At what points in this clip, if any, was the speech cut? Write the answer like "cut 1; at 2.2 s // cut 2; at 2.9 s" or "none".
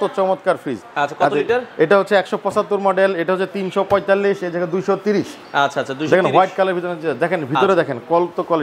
none